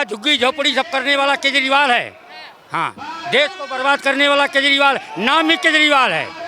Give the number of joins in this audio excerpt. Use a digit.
0